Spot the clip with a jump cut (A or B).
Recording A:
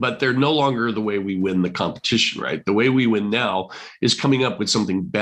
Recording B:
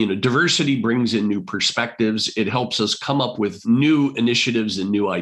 B